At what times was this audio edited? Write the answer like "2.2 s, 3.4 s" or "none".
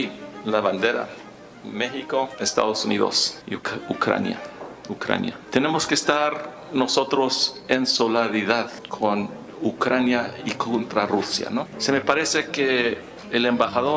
2.3 s, 3.3 s, 5.4 s, 8.8 s, 11.7 s

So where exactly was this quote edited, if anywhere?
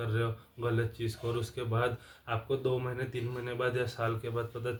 none

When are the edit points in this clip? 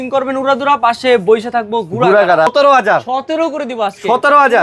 2.5 s

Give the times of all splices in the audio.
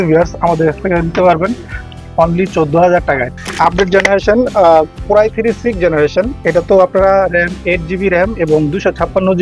3.3 s

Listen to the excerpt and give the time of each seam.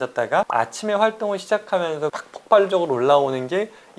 2.2 s

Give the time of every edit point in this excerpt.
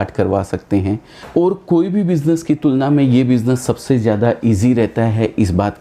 1.1 s

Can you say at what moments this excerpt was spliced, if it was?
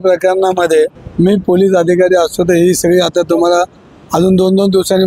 1.0 s

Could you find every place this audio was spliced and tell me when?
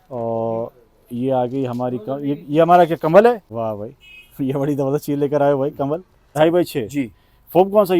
3.5 s, 6.2 s

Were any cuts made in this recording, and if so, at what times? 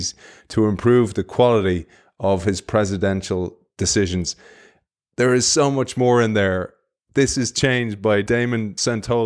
8.3 s

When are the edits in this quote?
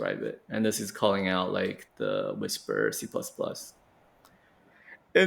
1.8 s

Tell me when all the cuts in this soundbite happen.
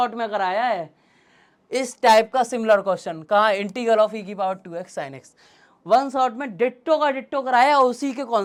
none

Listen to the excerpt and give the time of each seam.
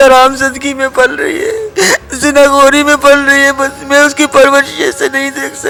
none

